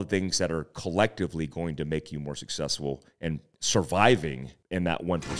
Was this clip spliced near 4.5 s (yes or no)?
yes